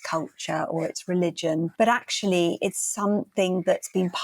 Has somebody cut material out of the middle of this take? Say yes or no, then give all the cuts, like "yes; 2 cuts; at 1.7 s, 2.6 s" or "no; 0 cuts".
yes; 1 cut; at 1.7 s